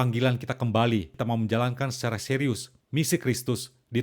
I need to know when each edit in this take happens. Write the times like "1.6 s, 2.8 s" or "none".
1.1 s, 2.7 s

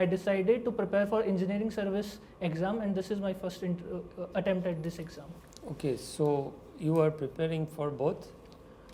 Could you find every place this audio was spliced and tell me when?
none

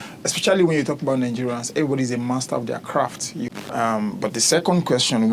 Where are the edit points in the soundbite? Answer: none

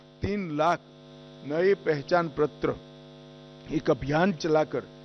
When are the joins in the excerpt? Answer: none

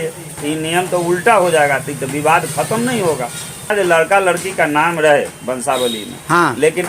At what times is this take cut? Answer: 3.7 s

